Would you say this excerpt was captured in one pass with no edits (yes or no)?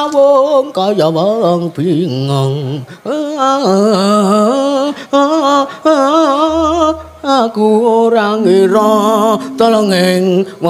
yes